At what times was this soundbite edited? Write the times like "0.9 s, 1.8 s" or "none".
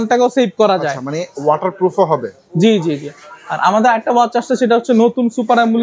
none